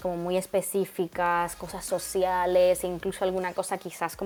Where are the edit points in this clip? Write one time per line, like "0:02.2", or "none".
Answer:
none